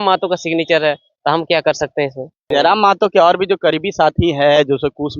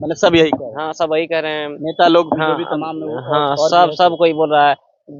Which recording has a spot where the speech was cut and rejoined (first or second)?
first